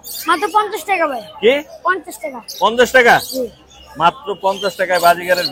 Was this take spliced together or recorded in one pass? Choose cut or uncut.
uncut